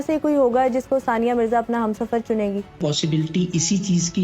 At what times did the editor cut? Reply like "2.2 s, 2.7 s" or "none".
2.8 s